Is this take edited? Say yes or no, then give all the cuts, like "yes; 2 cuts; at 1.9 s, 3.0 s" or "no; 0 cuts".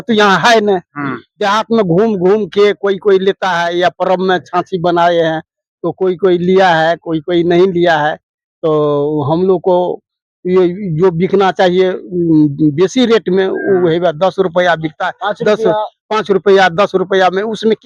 no; 0 cuts